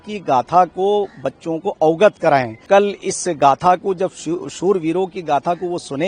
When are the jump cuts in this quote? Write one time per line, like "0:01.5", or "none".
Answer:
0:02.6